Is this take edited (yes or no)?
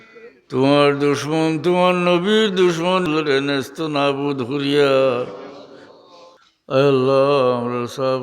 yes